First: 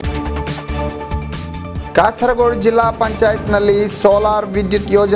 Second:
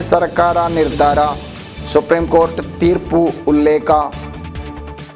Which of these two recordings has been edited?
first; 1 cut; at 1.2 s

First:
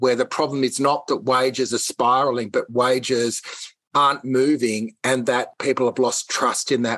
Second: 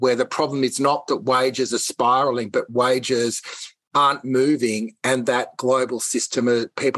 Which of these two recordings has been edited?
first; 1 cut; at 5.5 s

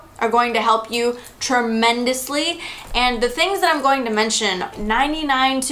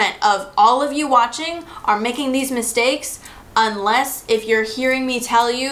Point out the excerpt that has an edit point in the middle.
first; 1 cut; at 4.7 s

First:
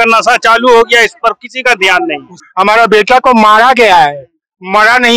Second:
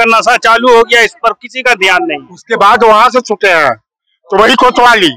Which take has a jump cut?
first; 1 cut; at 2.4 s

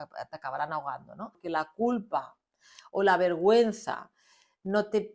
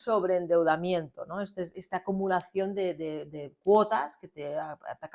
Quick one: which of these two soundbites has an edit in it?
first; 1 cut; at 1.4 s

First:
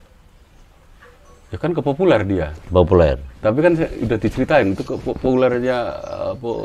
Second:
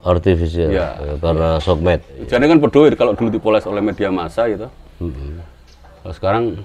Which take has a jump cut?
second; 1 cut; at 2.2 s

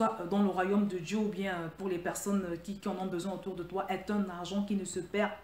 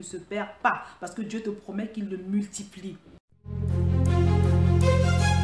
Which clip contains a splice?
second; 1 cut; at 3.3 s

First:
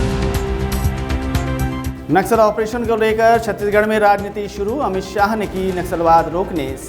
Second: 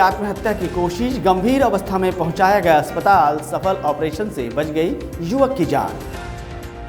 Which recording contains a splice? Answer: first; 1 cut; at 1.7 s

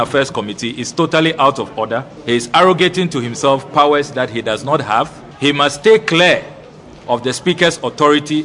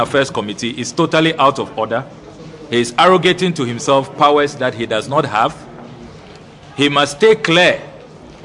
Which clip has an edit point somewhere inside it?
first; 2 cuts; at 2.1 s, 5.2 s

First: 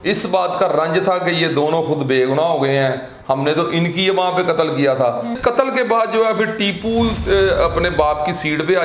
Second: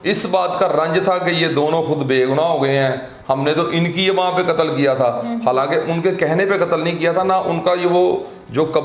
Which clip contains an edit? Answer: first; 1 cut; at 5.4 s

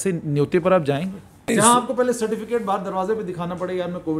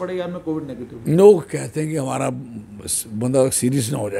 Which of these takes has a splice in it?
first; 1 cut; at 1.4 s

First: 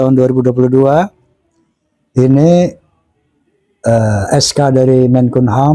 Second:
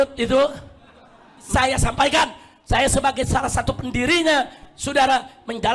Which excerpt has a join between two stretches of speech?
second; 1 cut; at 1.4 s

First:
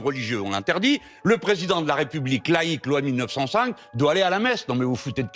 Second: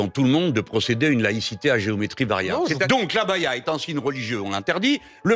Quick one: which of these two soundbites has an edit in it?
second; 1 cut; at 2.8 s

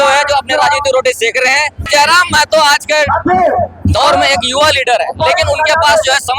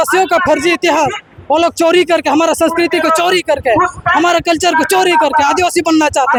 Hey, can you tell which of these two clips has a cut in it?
first; 1 cut; at 1.9 s

